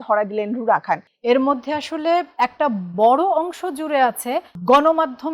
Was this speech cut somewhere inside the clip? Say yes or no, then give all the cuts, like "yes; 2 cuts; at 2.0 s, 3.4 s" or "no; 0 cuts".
yes; 2 cuts; at 1.1 s, 4.5 s